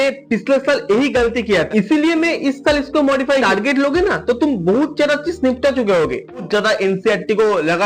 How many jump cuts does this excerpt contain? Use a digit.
3